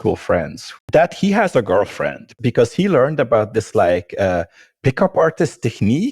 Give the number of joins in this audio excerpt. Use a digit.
1